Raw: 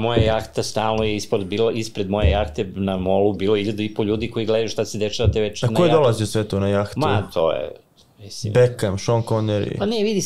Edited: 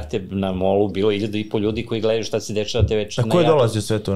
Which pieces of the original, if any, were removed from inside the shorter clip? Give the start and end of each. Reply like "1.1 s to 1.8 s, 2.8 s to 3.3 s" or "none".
none